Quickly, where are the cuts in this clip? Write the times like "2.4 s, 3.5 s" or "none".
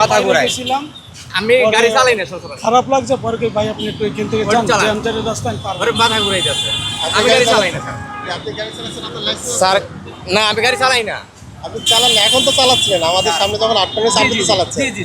none